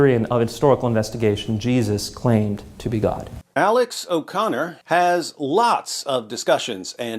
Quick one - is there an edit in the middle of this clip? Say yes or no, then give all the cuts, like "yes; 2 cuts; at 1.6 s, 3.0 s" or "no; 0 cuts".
yes; 2 cuts; at 3.3 s, 4.7 s